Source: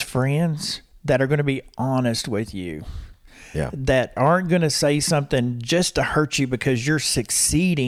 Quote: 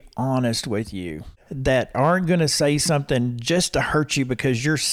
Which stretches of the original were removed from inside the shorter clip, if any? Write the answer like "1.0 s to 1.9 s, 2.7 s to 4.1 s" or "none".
3.1 s to 3.7 s